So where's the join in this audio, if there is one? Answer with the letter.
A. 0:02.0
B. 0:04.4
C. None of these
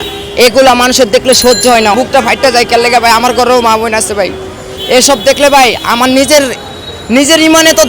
A